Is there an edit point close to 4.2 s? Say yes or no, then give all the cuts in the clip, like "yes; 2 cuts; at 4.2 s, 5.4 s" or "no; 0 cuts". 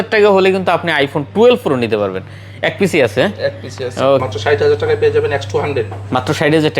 yes; 1 cut; at 4.2 s